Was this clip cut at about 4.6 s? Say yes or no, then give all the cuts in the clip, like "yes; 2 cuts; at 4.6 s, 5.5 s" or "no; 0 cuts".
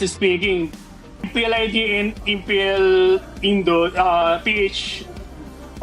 no; 1 cut; at 1.3 s